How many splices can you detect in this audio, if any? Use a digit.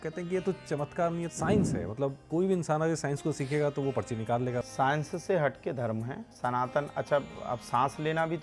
3